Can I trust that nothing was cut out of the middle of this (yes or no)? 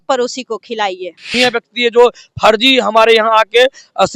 no